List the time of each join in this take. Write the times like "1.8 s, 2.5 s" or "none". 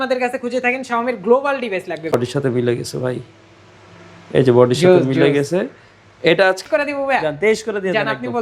2.1 s, 6.6 s